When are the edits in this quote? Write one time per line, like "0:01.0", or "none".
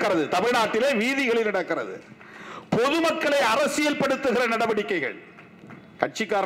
none